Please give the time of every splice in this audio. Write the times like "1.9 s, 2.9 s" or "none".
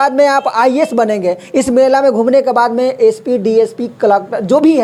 none

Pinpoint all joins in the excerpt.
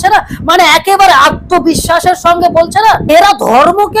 3.1 s

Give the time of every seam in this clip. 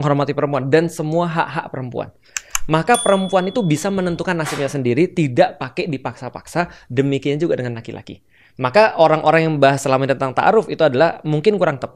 none

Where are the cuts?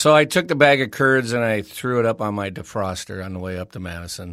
none

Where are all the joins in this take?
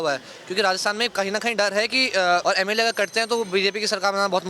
2.4 s

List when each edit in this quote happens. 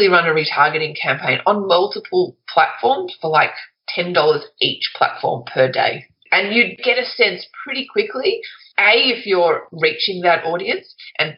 none

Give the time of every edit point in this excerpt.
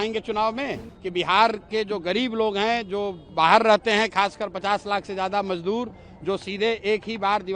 0.9 s

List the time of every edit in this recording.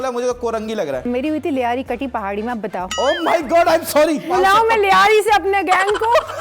1.0 s, 2.9 s, 4.2 s

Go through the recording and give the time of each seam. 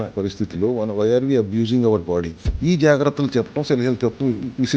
2.4 s

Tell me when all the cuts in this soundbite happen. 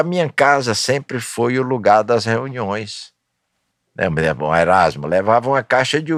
none

